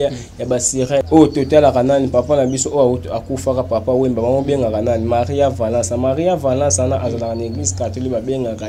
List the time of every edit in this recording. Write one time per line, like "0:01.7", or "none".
0:01.0